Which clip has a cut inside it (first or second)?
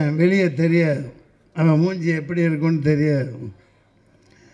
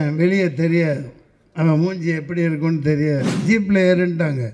second